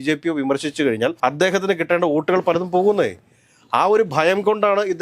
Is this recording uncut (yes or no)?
yes